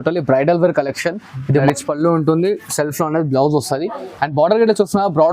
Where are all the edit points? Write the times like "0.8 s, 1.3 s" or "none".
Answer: 1.6 s